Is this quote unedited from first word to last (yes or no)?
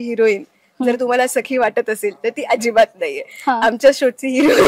yes